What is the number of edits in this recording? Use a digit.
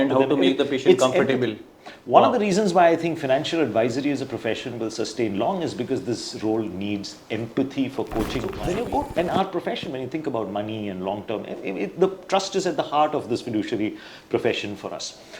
1